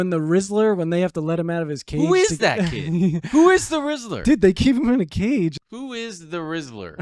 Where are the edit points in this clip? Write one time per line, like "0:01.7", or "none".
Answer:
0:05.6